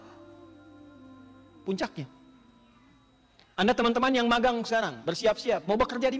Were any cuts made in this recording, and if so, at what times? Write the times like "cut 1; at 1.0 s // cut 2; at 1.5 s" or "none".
none